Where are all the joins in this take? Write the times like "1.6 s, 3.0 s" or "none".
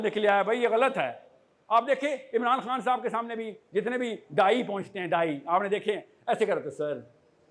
none